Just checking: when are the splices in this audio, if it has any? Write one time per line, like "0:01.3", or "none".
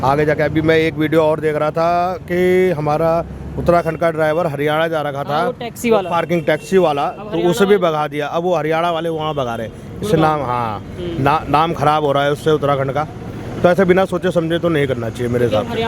none